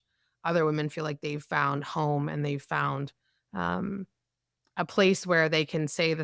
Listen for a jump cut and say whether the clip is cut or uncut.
uncut